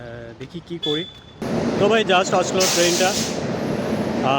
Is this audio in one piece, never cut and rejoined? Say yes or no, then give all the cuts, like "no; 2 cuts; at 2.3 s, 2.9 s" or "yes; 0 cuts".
no; 1 cut; at 1.4 s